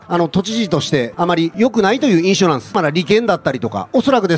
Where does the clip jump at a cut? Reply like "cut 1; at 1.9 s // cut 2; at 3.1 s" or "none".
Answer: cut 1; at 2.7 s